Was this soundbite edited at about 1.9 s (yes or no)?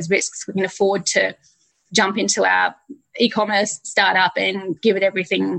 no